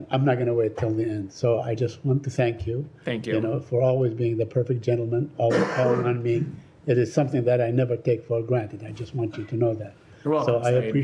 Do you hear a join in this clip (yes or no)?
no